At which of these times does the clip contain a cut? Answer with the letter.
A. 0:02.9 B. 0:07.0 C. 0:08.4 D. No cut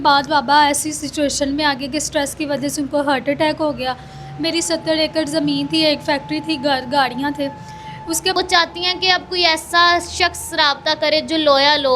C